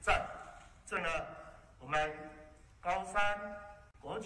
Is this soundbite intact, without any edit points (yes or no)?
no